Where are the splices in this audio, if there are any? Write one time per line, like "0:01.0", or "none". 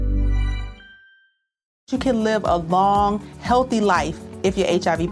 0:01.8

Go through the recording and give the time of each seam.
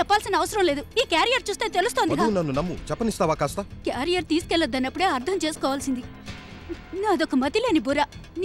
none

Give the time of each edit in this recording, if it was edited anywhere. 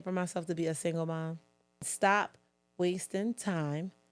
0:01.9

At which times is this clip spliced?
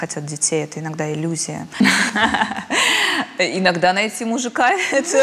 0:01.6

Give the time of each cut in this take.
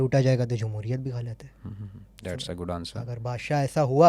none

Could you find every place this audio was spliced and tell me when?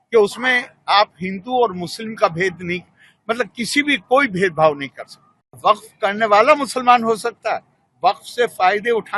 0:05.5

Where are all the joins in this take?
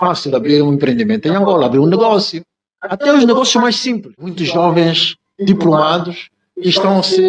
0:04.4

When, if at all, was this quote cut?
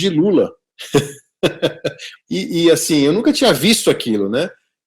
0:02.1

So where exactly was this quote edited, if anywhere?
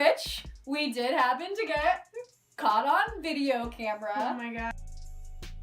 0:04.7

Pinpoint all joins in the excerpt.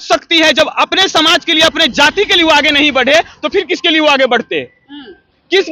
none

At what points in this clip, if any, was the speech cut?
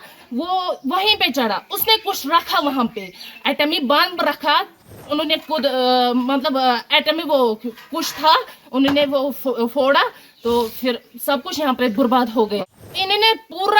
0:05.0
0:12.6

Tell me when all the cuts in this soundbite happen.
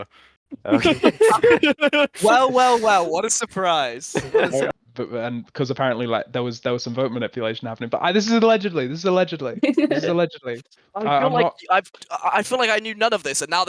0:04.7

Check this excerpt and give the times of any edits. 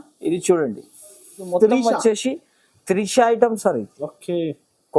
0:01.5

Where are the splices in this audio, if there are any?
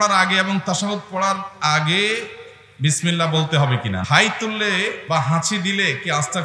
0:04.0
0:05.0

